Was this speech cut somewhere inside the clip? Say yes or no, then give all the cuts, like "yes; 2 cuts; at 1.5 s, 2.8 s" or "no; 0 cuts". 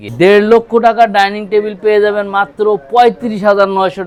no; 0 cuts